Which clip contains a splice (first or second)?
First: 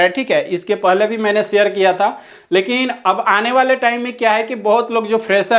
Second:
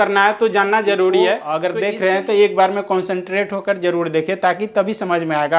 second